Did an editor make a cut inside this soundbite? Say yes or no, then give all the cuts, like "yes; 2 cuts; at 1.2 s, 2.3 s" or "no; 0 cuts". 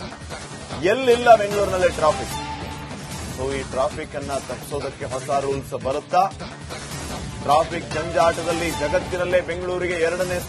no; 0 cuts